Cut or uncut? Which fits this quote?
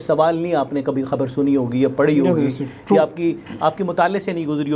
uncut